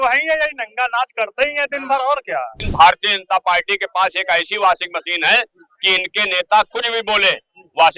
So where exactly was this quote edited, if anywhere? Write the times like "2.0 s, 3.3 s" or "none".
2.6 s